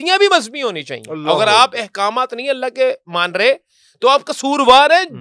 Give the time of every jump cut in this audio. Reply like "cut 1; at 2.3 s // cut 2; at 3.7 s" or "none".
none